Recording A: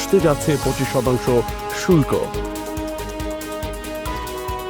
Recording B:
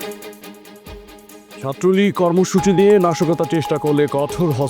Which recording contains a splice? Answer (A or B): B